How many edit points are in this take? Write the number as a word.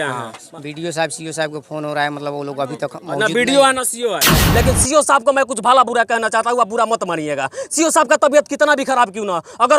one